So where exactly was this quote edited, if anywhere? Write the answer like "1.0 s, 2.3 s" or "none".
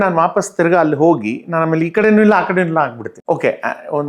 3.1 s